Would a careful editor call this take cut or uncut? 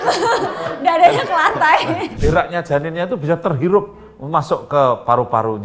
cut